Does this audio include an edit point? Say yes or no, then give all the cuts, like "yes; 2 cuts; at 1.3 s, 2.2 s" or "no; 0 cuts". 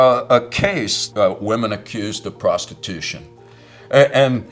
yes; 1 cut; at 0.9 s